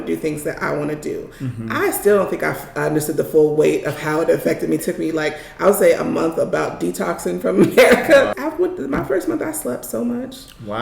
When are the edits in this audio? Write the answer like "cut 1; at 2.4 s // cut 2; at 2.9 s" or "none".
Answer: cut 1; at 4.8 s // cut 2; at 8.4 s